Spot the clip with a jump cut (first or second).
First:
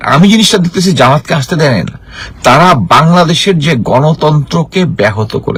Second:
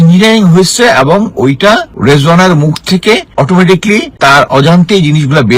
second